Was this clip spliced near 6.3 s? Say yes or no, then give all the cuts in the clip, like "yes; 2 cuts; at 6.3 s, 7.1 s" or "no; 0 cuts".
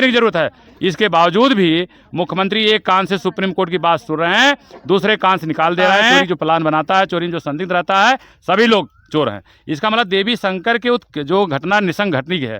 yes; 1 cut; at 6.3 s